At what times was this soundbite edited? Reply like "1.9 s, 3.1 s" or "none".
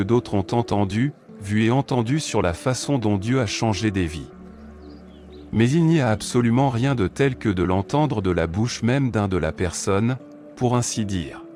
none